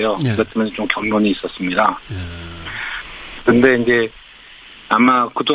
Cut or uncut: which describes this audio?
cut